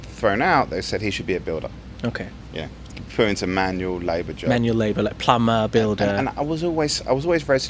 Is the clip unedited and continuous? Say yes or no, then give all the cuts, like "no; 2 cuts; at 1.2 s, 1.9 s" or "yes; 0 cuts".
yes; 0 cuts